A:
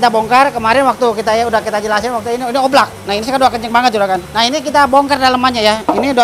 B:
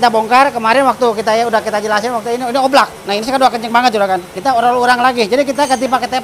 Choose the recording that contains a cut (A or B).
B